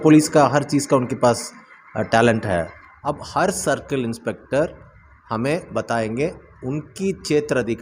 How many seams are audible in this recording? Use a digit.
1